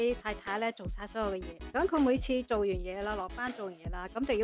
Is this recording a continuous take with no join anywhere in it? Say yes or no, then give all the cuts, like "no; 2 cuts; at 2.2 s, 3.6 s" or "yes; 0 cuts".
no; 1 cut; at 1.6 s